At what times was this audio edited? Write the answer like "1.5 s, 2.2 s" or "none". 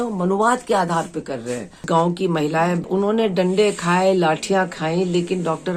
1.8 s, 2.9 s